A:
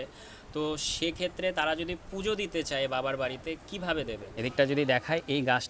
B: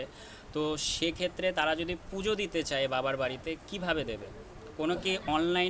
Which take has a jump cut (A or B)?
A